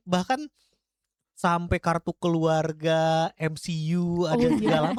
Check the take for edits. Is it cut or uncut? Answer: uncut